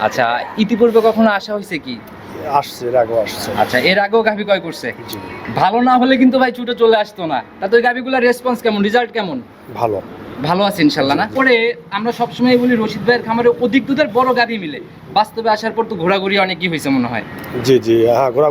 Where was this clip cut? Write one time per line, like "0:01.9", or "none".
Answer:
0:11.3